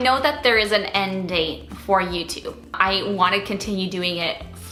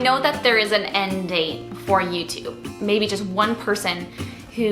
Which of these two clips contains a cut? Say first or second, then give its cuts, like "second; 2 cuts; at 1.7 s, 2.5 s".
second; 1 cut; at 2.7 s